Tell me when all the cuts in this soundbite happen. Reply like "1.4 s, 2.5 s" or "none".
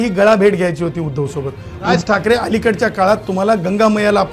1.9 s

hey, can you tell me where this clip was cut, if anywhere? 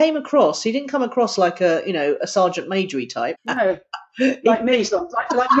3.4 s

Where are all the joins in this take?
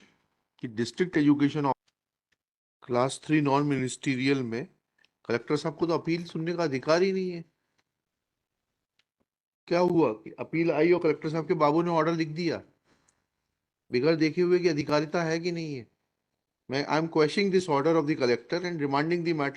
1.8 s

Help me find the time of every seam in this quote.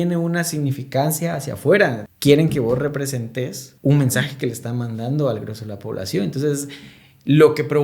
2.1 s, 3.6 s

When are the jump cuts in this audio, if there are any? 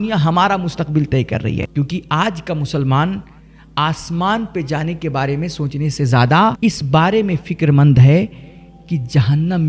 1.6 s

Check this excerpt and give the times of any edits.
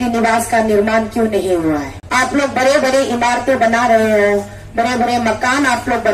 2.0 s

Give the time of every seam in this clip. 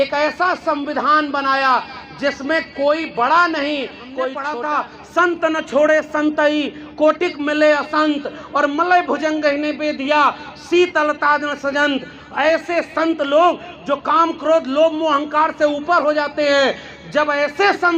4.6 s

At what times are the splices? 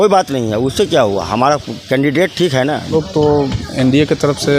2.9 s

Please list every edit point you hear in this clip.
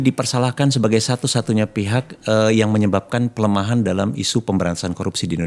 none

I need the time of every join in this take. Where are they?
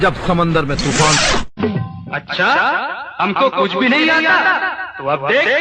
1.2 s

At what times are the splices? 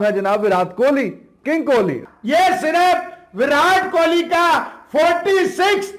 2.0 s

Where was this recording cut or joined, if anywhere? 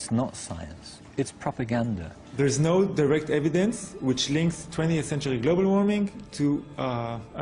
none

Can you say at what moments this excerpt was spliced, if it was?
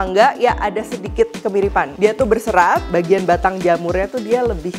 2.9 s

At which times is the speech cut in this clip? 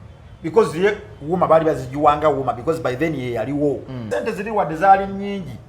4.0 s

